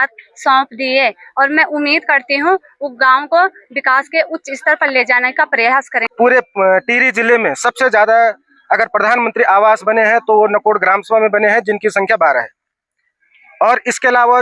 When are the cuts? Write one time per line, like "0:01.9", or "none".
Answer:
0:06.0